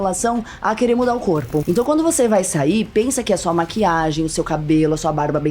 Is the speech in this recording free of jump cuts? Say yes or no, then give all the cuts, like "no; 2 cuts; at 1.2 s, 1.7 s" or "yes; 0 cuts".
no; 1 cut; at 1.7 s